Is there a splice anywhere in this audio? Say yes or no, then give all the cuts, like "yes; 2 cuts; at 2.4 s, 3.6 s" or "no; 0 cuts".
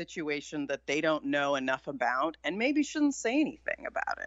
no; 0 cuts